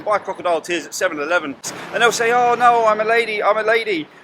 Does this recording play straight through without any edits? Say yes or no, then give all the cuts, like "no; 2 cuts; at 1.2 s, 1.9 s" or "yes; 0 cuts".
no; 1 cut; at 1.8 s